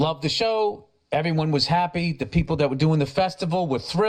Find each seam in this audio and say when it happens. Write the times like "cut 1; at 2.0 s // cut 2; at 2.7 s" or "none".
none